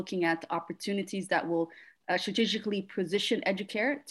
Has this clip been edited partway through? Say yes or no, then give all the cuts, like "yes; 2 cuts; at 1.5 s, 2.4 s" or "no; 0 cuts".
no; 0 cuts